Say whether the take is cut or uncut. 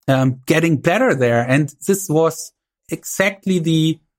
cut